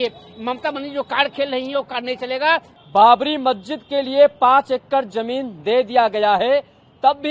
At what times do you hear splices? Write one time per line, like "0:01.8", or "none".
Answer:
0:02.7